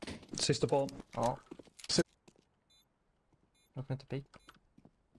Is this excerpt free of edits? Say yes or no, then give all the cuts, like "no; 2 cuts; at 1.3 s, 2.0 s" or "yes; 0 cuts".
no; 1 cut; at 2.2 s